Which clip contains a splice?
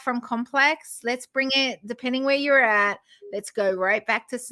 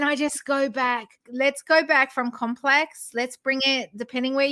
second; 1 cut; at 1.2 s

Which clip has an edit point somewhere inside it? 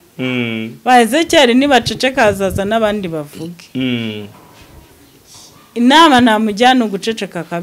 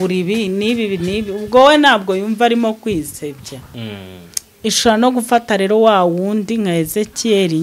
second; 1 cut; at 3.7 s

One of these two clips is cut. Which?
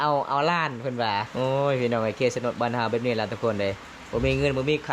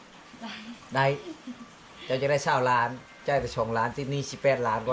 first; 1 cut; at 1.3 s

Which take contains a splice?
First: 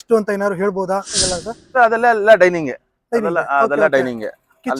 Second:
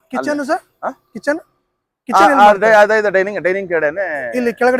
first; 1 cut; at 1.2 s

